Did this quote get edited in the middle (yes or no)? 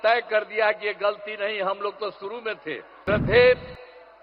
yes